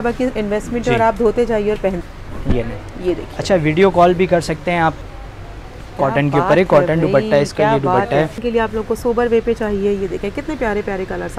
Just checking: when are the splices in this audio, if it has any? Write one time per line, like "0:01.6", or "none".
0:02.0
0:05.0
0:08.4